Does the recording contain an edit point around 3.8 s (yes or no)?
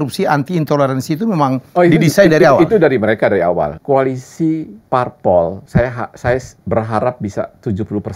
yes